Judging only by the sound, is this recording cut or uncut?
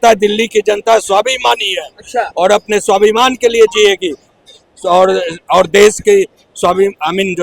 uncut